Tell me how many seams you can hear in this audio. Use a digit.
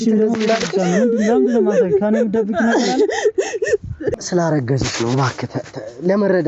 1